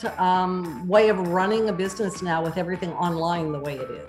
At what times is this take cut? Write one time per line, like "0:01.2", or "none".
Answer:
none